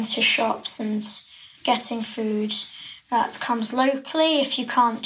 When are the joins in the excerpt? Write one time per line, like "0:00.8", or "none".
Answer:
0:01.4